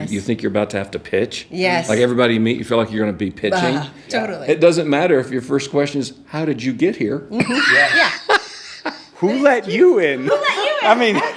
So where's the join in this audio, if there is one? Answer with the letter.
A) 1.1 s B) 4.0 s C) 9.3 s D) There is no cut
B